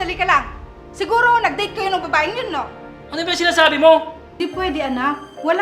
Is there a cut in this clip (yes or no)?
yes